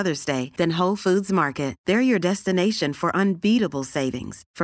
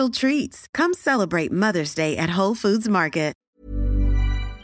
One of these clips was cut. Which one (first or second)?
second